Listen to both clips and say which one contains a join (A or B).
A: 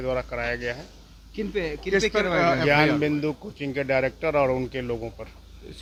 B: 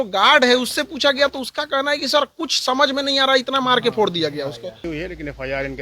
B